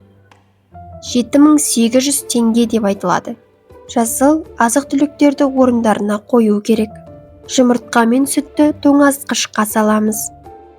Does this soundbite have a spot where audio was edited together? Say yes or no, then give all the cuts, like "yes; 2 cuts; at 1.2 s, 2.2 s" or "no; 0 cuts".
yes; 1 cut; at 1.1 s